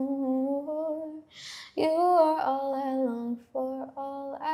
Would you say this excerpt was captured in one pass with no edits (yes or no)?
yes